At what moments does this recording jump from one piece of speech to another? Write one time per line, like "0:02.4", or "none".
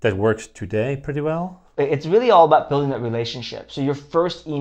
none